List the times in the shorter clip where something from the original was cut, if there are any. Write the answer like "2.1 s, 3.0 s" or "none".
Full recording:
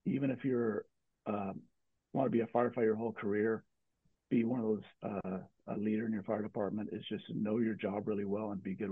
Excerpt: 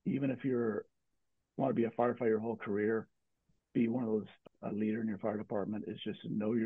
1.1 s, 4.4 s